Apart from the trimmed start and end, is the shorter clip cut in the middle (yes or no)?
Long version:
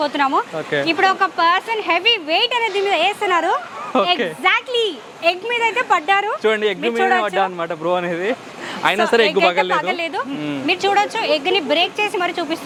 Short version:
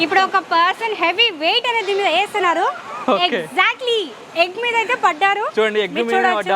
no